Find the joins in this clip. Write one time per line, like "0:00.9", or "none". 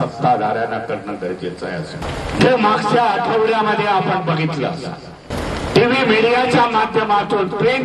0:02.0
0:05.3